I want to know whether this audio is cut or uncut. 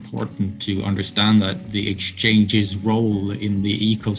uncut